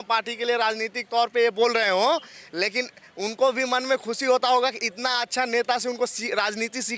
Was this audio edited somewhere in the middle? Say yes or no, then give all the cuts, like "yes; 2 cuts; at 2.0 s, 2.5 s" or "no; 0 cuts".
no; 0 cuts